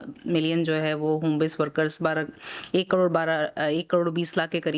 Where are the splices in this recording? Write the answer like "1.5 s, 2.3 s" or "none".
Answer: none